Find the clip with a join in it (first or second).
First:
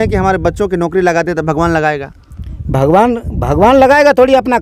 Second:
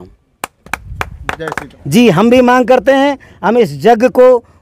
second